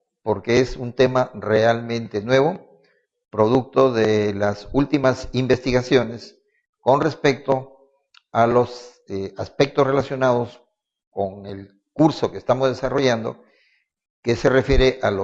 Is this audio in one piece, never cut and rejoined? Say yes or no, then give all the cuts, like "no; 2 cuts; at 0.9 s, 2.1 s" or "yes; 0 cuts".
yes; 0 cuts